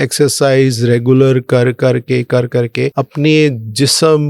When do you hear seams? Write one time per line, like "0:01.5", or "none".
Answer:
0:02.9